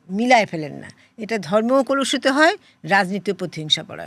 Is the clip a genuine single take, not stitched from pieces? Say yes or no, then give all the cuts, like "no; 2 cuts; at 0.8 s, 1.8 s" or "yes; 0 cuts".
yes; 0 cuts